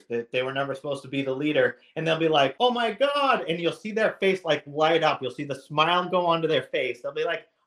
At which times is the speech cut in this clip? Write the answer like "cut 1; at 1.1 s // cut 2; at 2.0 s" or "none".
cut 1; at 2.5 s

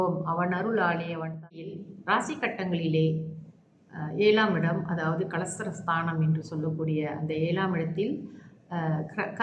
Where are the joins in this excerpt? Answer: cut 1; at 1.7 s

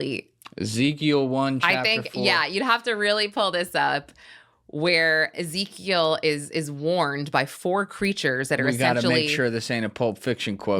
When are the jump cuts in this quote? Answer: cut 1; at 2.8 s

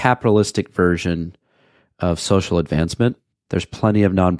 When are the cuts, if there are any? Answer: none

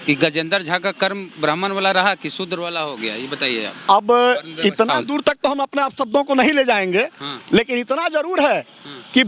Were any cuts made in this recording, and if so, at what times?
none

